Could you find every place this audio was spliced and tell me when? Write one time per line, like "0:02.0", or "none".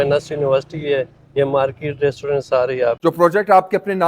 0:03.0